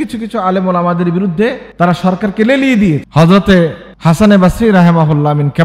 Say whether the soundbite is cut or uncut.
cut